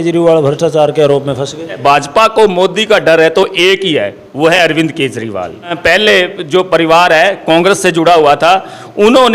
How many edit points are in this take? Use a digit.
2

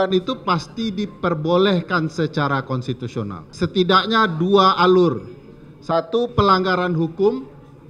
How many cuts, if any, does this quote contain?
1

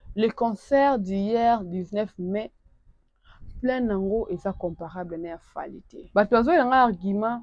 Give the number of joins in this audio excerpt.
1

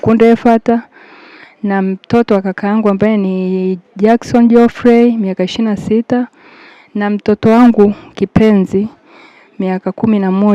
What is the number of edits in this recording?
0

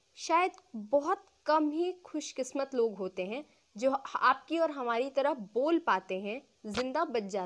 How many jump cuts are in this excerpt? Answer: 0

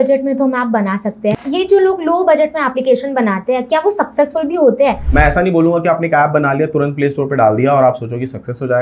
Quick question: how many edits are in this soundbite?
2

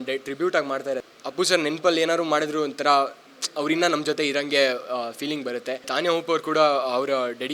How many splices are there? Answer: 2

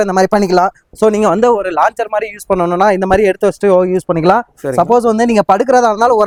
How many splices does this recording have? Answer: 0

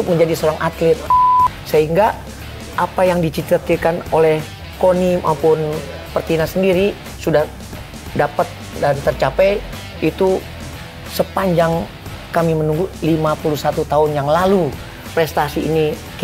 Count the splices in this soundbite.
1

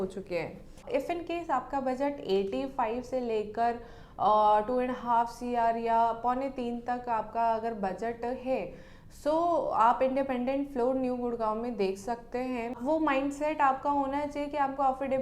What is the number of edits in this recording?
2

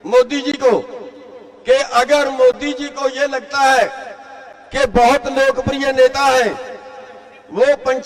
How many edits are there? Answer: 0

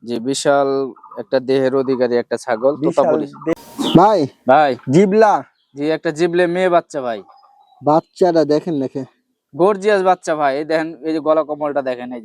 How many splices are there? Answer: 1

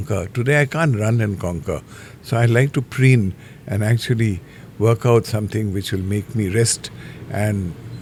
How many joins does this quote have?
0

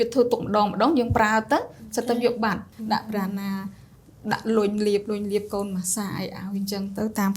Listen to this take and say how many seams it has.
1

